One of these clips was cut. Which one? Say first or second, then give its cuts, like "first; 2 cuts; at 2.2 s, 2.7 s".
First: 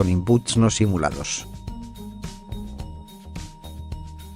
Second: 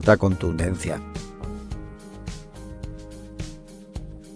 first; 1 cut; at 2.8 s